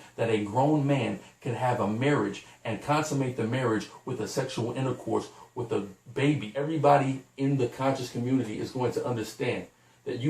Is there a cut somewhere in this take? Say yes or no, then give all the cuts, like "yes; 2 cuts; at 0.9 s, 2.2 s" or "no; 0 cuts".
yes; 1 cut; at 6.5 s